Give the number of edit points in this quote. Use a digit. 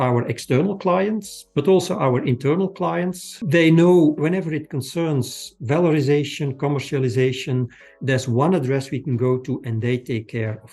2